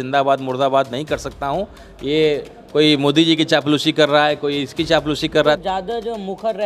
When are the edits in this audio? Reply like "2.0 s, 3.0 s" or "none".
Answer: 5.6 s

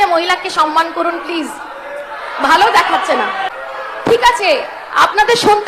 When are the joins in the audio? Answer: 3.5 s

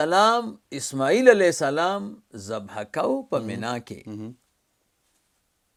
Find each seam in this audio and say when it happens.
none

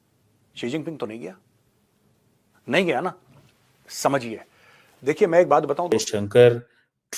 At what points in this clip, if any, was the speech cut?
5.9 s

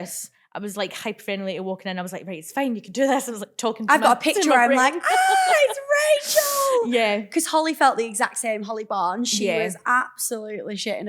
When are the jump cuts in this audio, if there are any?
none

